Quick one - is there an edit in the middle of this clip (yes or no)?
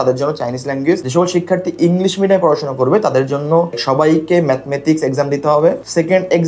no